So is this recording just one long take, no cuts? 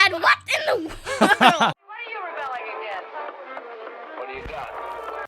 no; 1 cut; at 1.9 s

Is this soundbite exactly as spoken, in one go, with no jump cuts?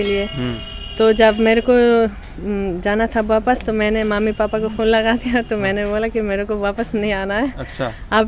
yes; 0 cuts

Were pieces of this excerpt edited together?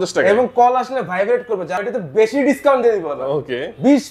yes; 1 cut; at 1.8 s

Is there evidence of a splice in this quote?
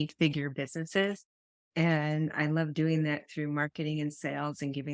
no; 0 cuts

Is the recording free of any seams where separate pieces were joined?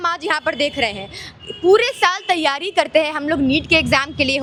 yes; 0 cuts

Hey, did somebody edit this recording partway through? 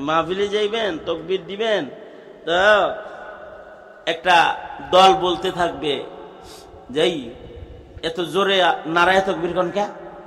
no; 0 cuts

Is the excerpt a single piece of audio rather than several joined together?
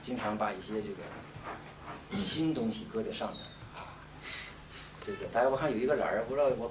yes; 0 cuts

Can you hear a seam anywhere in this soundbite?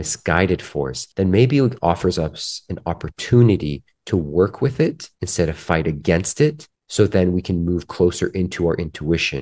yes; 1 cut; at 1.0 s

